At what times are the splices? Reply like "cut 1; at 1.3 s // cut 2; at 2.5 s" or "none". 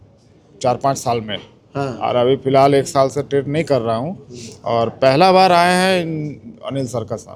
none

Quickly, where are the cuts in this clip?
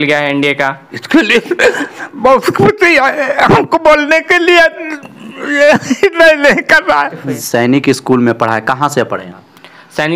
cut 1; at 0.9 s // cut 2; at 7.4 s

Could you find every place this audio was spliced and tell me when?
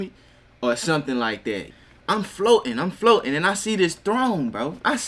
cut 1; at 1.7 s

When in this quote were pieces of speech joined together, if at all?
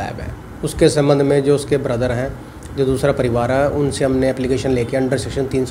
none

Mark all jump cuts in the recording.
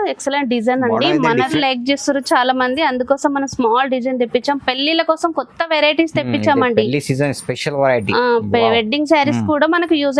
cut 1; at 1.6 s

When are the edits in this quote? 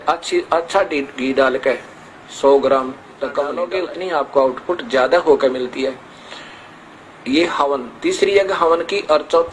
cut 1; at 3.6 s

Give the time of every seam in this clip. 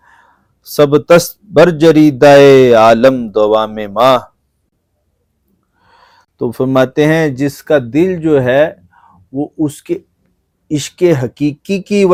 none

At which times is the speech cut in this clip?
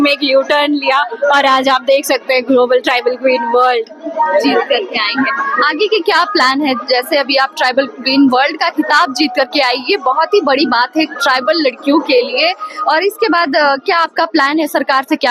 none

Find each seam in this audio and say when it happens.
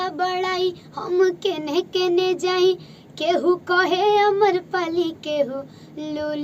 none

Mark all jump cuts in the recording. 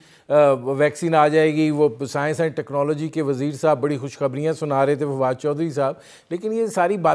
none

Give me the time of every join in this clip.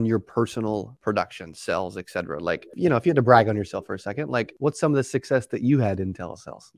cut 1; at 0.9 s // cut 2; at 2.7 s // cut 3; at 4.5 s

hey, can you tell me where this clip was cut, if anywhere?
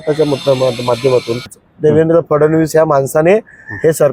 cut 1; at 1.6 s

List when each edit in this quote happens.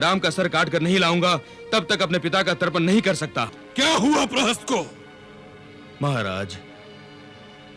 cut 1; at 3.6 s

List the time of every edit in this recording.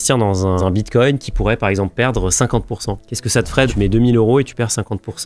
none

